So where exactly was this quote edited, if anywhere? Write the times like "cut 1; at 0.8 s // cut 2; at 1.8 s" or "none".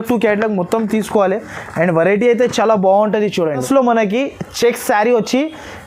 cut 1; at 3.6 s